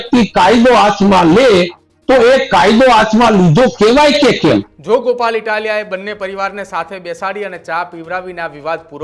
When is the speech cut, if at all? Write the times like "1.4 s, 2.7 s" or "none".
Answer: 4.7 s